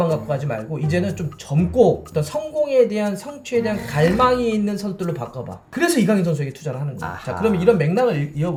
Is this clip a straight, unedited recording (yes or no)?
yes